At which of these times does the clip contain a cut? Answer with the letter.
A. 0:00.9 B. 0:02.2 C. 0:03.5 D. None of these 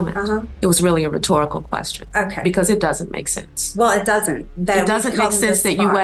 D